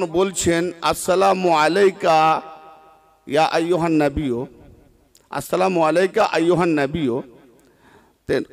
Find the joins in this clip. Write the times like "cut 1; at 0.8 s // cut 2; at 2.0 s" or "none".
none

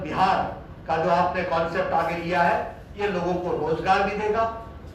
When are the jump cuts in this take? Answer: none

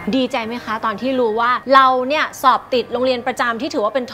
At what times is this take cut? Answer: cut 1; at 1.6 s

